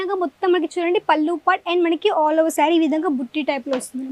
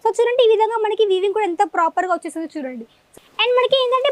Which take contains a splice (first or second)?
second